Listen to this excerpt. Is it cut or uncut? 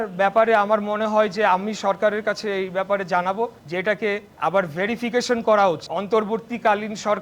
cut